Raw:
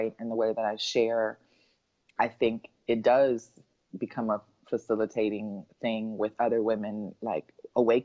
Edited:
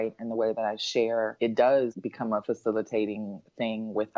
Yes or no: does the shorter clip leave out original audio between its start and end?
yes